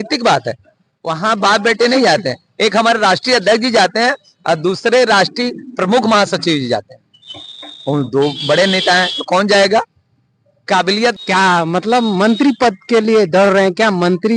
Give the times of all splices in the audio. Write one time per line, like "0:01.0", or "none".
0:11.2